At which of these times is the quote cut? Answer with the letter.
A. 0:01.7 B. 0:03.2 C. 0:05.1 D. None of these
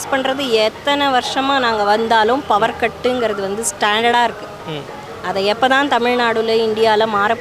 D